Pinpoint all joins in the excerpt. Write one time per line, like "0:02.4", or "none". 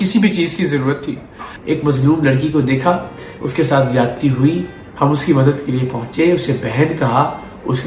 0:01.5